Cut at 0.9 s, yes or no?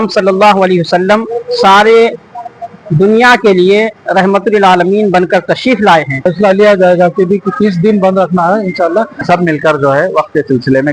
no